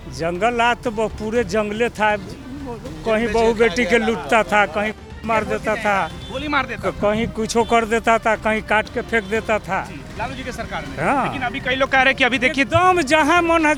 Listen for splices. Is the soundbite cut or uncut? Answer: uncut